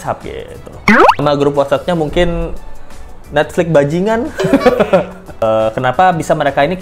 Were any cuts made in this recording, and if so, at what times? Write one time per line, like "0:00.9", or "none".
0:01.2
0:05.4